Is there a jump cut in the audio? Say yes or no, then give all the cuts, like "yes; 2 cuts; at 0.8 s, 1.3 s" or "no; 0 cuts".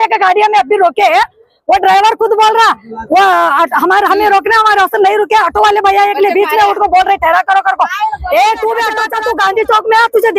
yes; 1 cut; at 9.1 s